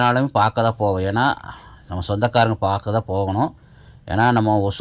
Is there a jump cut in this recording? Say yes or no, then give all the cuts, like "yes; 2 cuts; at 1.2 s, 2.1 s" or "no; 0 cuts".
no; 0 cuts